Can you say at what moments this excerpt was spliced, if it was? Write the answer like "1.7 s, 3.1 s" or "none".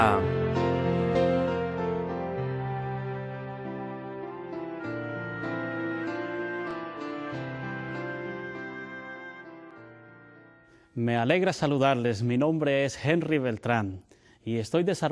none